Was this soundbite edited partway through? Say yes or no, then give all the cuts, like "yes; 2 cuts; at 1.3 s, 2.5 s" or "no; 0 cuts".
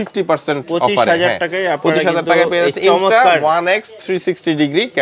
no; 0 cuts